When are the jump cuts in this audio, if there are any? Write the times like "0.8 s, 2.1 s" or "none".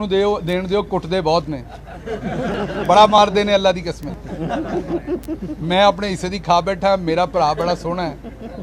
none